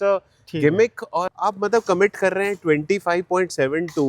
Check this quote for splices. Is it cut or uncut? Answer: cut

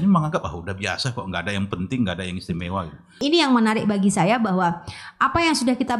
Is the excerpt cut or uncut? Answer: cut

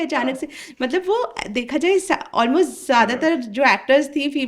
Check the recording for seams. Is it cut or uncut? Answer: uncut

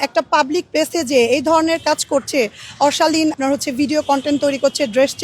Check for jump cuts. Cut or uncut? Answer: cut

